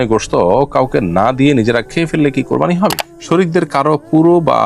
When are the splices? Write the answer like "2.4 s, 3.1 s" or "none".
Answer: 3.0 s